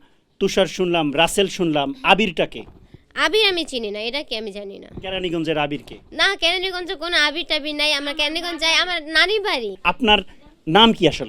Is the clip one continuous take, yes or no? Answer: yes